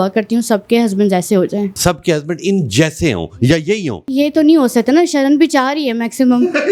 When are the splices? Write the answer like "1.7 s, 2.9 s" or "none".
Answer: 1.7 s, 4.0 s